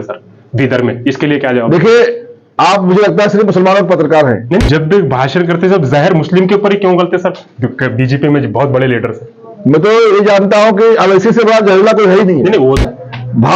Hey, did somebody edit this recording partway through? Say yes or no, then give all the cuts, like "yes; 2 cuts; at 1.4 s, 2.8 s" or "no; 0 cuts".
yes; 2 cuts; at 4.6 s, 12.7 s